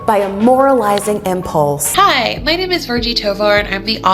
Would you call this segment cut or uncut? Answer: cut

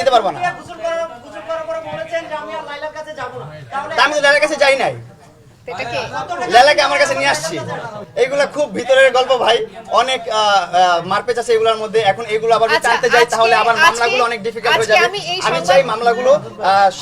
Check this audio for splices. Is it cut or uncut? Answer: uncut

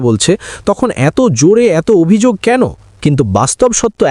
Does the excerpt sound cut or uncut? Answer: cut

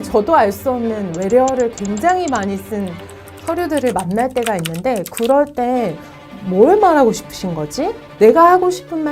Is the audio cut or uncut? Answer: cut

